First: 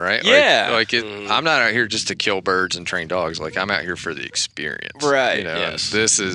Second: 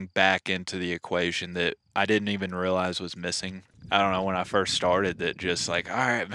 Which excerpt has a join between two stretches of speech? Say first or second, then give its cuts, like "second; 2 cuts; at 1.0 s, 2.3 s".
second; 1 cut; at 3.7 s